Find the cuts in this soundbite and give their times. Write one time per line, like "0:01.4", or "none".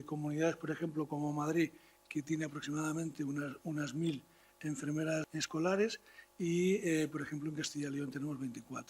0:05.2